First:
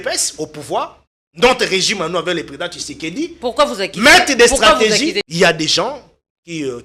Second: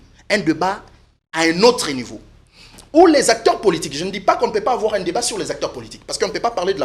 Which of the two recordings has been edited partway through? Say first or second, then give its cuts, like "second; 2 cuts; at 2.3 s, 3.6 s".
first; 1 cut; at 5.2 s